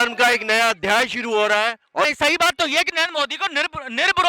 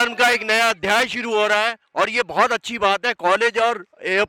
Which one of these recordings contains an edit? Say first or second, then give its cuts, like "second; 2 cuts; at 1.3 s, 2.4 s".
first; 1 cut; at 2.1 s